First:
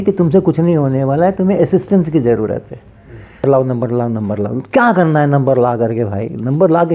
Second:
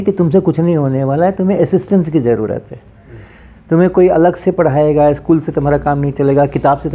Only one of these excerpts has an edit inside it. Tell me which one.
first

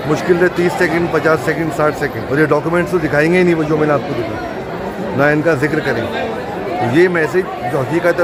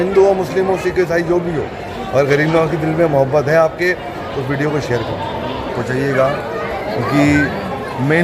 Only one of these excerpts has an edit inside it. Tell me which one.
second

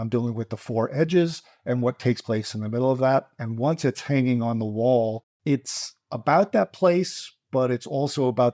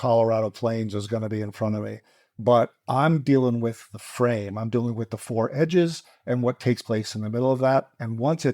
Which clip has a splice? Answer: first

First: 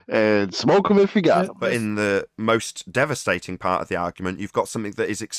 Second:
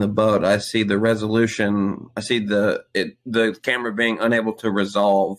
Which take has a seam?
first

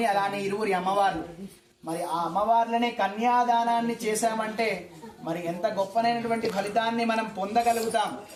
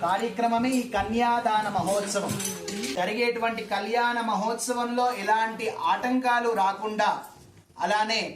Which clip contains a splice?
second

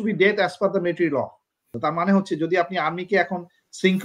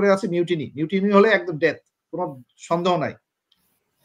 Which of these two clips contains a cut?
first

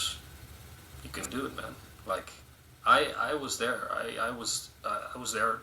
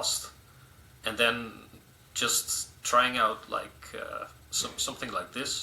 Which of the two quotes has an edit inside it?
first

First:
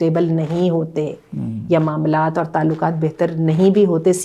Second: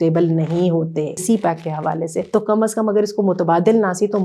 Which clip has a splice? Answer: second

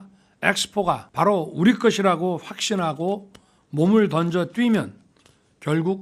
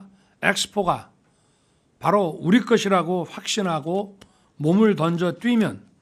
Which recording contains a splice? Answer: first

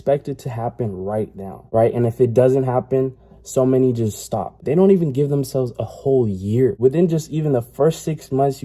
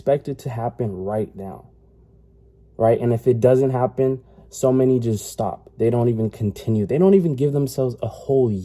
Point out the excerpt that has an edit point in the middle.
first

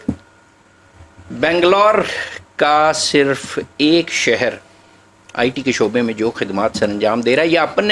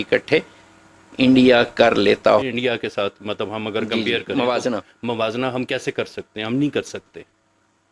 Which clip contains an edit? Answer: second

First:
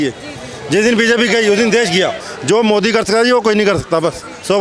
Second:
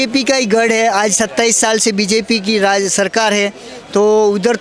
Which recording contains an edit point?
first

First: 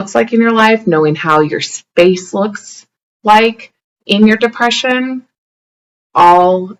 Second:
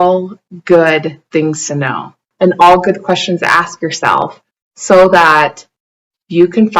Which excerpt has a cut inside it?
second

